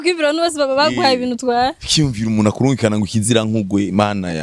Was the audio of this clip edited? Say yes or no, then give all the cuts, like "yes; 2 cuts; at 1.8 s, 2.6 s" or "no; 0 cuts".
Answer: no; 0 cuts